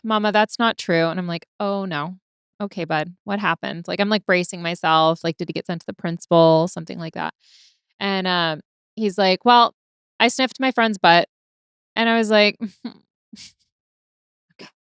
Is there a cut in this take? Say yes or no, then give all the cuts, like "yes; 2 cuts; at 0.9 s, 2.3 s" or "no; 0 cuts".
no; 0 cuts